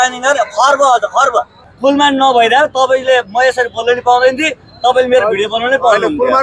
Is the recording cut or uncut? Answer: cut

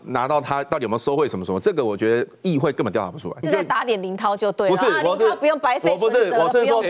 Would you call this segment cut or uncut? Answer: cut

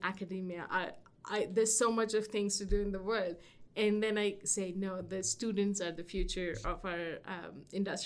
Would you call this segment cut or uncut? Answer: uncut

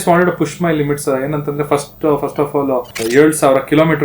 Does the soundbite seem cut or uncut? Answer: cut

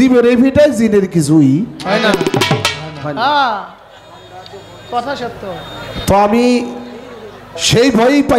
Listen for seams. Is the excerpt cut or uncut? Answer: uncut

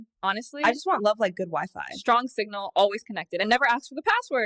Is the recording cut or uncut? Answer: uncut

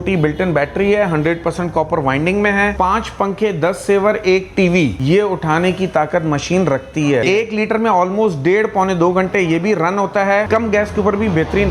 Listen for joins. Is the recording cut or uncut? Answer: cut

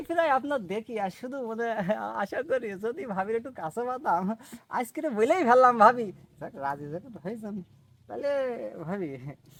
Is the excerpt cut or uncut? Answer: uncut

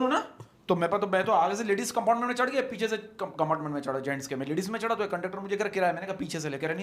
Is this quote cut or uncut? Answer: uncut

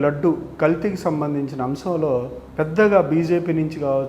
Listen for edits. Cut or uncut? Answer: cut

